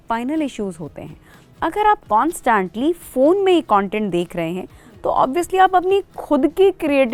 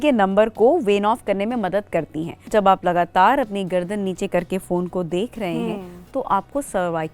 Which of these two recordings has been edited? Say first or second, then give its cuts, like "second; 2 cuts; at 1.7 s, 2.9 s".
second; 1 cut; at 2.5 s